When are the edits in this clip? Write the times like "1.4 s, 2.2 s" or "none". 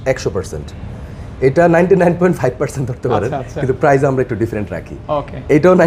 none